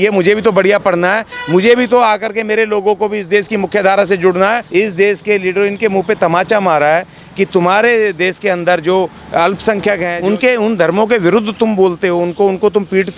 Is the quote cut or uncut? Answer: cut